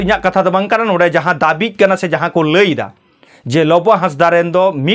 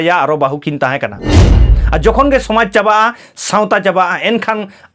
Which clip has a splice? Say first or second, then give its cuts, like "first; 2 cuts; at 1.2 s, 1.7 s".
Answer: second; 1 cut; at 1.4 s